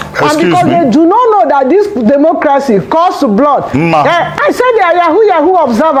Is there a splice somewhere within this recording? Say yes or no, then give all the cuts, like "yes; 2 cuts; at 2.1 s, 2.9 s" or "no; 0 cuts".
no; 0 cuts